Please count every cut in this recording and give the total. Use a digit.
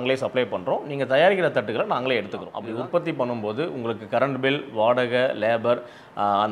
1